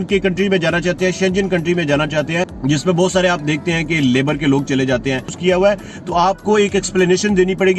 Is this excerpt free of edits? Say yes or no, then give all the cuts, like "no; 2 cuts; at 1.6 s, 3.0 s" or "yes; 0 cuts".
no; 2 cuts; at 2.5 s, 5.3 s